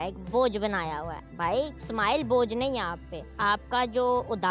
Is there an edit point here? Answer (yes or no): no